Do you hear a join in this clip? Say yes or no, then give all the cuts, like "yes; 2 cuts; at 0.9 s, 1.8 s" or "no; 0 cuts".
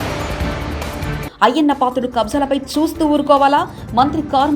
no; 0 cuts